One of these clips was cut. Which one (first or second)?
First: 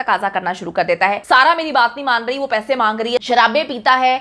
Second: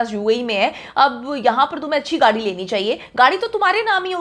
first